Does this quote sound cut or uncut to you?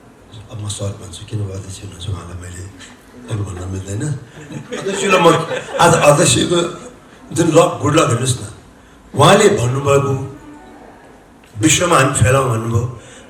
uncut